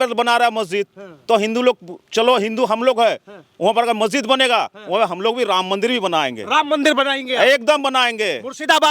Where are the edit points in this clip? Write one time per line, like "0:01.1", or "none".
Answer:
none